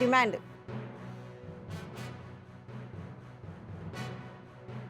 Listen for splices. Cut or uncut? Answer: uncut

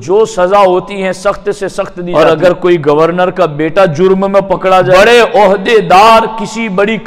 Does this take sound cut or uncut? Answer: cut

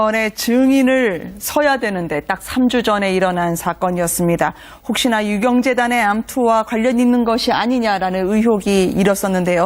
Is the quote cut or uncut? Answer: cut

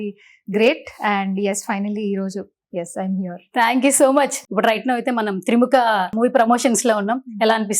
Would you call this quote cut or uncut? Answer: cut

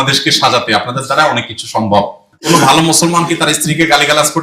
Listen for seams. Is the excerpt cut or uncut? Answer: cut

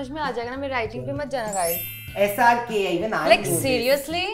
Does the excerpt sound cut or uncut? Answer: uncut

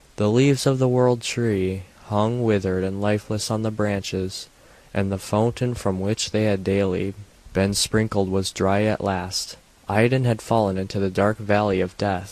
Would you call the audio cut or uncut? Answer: cut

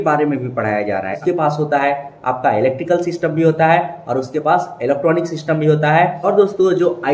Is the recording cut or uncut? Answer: cut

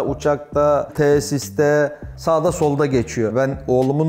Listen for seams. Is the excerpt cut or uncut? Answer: cut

